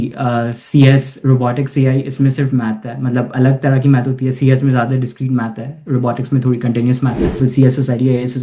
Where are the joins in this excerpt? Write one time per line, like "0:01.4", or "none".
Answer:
0:07.4